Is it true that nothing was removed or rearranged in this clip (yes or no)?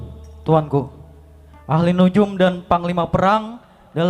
yes